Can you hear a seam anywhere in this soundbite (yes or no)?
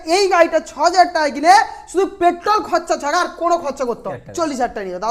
yes